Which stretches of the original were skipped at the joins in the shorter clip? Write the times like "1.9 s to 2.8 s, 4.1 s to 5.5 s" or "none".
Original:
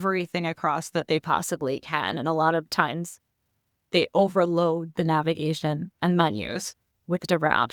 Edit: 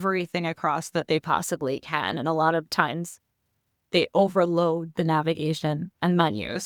none